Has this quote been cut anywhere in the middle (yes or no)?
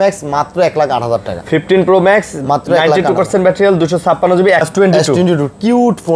yes